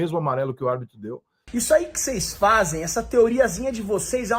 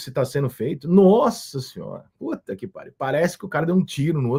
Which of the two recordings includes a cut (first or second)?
first